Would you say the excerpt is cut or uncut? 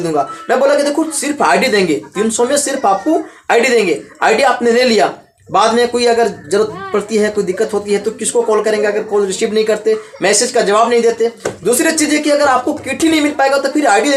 uncut